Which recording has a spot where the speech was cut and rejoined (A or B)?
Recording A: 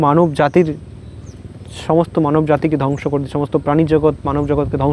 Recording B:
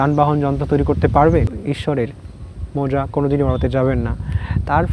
B